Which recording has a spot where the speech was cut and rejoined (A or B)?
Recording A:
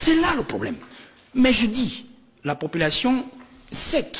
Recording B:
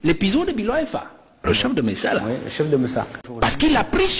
B